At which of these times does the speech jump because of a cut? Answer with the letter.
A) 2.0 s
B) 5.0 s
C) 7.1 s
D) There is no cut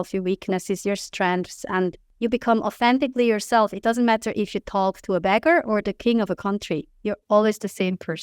A